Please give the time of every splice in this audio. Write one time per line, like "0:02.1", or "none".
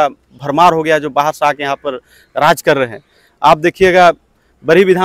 none